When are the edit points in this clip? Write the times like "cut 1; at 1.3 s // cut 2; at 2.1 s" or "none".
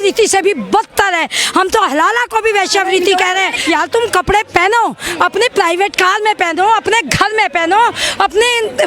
cut 1; at 3.6 s